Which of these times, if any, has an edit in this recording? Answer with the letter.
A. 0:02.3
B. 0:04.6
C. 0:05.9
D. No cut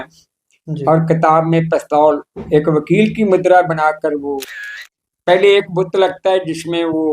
B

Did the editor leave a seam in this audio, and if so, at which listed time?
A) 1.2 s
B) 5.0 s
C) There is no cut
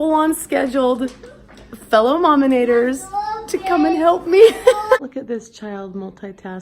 B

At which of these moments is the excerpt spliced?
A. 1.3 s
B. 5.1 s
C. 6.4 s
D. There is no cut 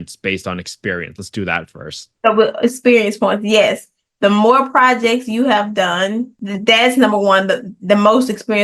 C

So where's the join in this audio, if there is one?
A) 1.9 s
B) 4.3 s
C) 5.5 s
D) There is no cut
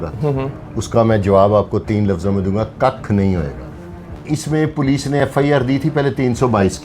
B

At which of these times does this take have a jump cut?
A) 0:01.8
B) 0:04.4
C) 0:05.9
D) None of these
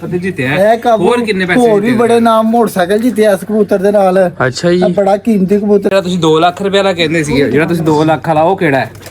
C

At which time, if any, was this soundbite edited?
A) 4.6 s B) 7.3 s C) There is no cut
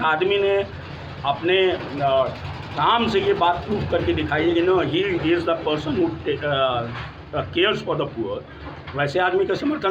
C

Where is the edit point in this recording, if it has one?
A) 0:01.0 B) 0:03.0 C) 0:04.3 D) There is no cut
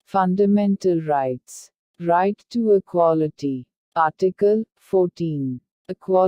C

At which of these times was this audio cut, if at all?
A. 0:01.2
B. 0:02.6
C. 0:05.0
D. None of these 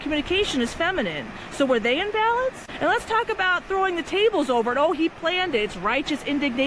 B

